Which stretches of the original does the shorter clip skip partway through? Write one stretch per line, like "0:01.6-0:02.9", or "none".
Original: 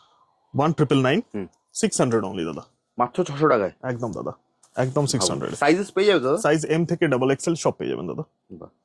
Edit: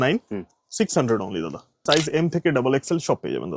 0:02.9-0:06.4